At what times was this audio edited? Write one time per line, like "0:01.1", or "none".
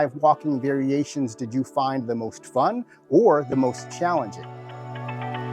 0:04.6